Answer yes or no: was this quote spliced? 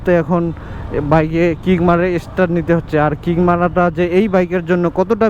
no